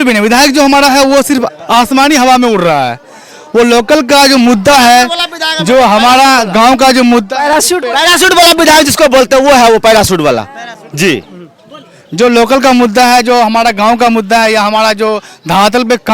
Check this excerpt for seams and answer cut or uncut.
uncut